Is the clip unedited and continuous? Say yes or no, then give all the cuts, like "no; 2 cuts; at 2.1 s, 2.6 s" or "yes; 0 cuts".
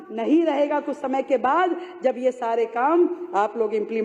yes; 0 cuts